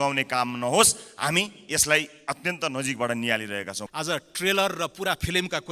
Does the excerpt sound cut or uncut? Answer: cut